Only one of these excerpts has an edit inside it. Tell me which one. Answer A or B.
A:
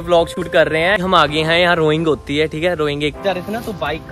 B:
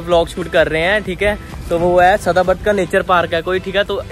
A